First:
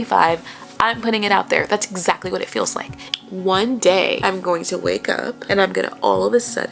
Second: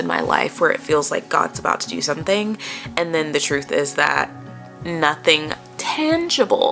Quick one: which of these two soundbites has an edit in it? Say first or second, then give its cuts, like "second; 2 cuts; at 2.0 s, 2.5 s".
first; 3 cuts; at 3.0 s, 4.2 s, 5.4 s